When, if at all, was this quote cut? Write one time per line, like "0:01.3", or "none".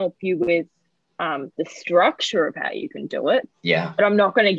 none